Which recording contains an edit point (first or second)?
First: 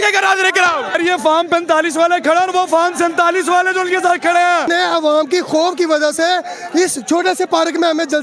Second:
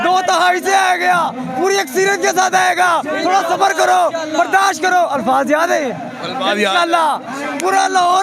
first